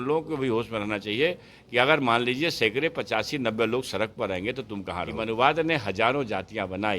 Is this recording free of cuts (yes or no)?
no